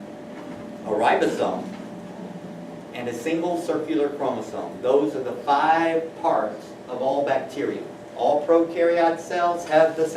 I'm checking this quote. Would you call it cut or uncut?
cut